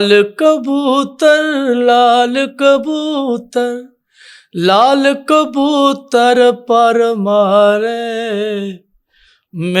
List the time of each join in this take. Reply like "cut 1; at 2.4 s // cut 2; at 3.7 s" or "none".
none

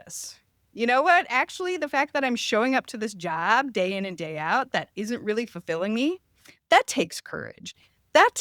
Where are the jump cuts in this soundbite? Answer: none

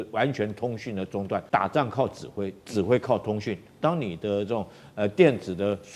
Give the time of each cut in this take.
cut 1; at 1.4 s

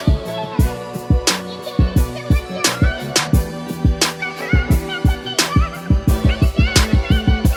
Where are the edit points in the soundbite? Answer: none

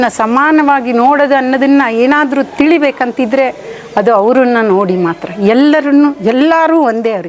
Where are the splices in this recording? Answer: none

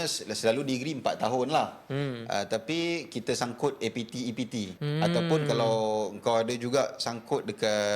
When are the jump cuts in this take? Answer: cut 1; at 4.8 s

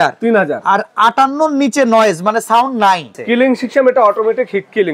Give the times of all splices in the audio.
cut 1; at 3.2 s

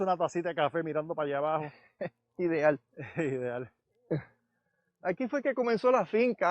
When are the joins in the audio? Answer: none

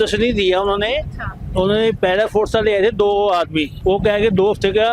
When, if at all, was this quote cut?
cut 1; at 3.7 s

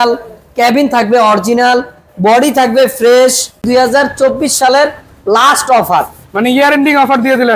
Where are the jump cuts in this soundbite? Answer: cut 1; at 3.6 s

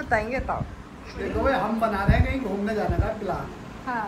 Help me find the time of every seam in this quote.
cut 1; at 1.1 s

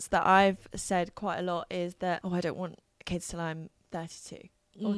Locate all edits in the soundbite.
cut 1; at 2.2 s

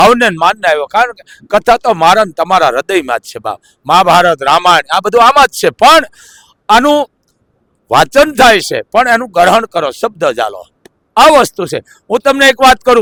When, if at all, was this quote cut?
none

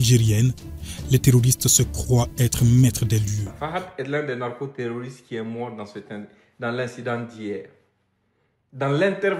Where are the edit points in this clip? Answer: cut 1; at 3.5 s

